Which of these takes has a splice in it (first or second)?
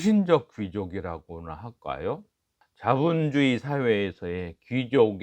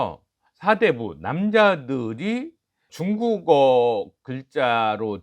second